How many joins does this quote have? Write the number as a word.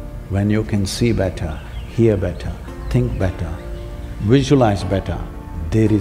zero